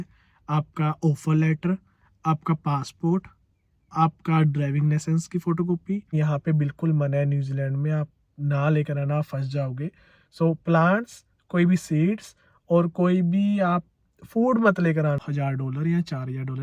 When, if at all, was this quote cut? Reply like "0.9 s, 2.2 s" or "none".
6.2 s, 15.2 s